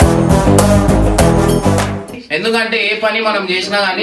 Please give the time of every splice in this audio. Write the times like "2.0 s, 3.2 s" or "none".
2.1 s